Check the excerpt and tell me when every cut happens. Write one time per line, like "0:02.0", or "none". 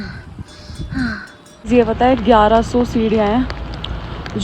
0:01.5

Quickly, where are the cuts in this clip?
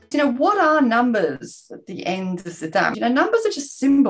0:02.9

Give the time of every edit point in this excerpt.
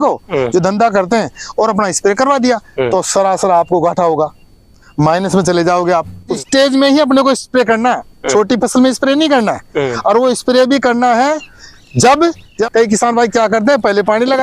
0:06.4
0:12.6

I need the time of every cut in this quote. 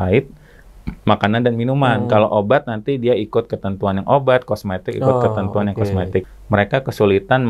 0:06.2

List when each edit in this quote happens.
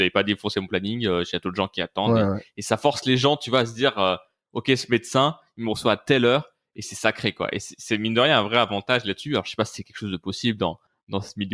none

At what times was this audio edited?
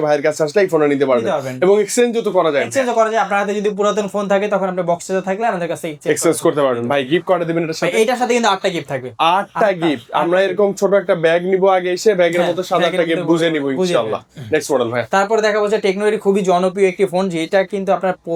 none

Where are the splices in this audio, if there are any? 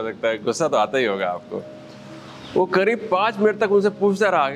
none

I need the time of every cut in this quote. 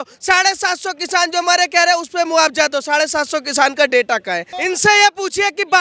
0:04.5

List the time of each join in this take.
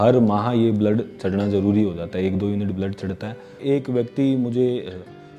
0:03.6

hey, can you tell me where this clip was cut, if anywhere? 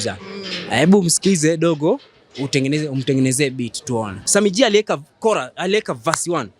0:04.2

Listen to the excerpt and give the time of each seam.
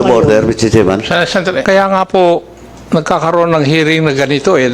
0:01.6

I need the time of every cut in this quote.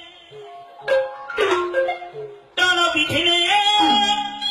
0:01.0

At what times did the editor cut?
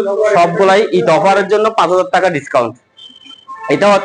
none

